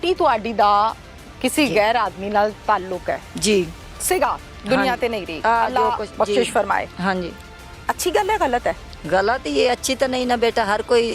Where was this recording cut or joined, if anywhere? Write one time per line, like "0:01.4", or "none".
none